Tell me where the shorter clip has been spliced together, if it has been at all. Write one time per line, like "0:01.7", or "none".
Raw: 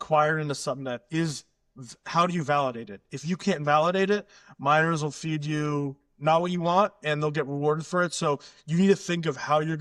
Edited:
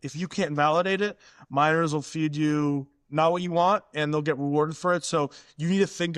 none